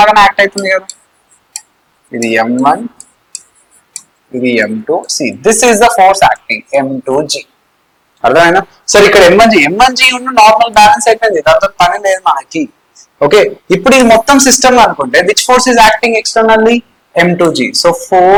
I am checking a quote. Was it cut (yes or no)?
no